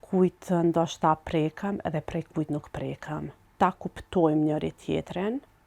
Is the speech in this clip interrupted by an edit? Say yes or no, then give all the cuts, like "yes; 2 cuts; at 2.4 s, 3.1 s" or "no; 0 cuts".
yes; 1 cut; at 3.4 s